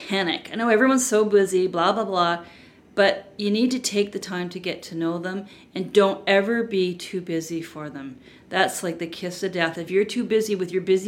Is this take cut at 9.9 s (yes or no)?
yes